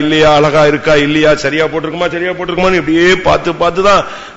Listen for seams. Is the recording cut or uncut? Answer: uncut